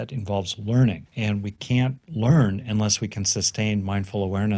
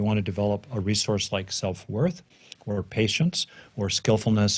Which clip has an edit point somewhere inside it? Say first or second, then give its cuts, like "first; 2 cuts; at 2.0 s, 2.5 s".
first; 2 cuts; at 1.1 s, 2.0 s